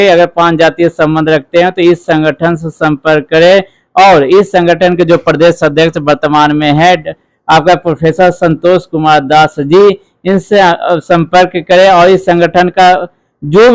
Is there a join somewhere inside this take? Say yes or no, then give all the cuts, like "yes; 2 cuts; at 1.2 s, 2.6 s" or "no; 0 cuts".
no; 0 cuts